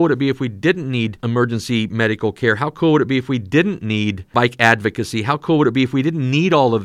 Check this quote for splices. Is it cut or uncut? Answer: cut